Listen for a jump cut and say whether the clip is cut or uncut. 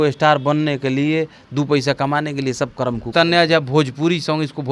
cut